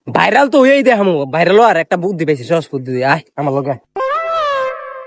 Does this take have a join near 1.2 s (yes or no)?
no